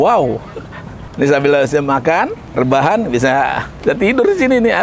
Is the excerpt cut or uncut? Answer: cut